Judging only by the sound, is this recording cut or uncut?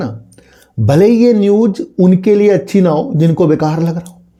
uncut